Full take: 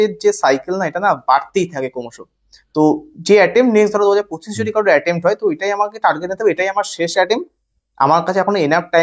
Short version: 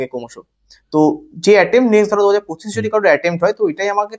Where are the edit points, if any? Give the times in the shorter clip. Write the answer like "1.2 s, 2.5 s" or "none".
none